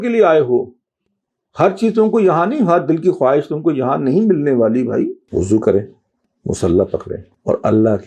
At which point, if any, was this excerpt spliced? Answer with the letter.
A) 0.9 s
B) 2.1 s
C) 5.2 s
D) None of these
C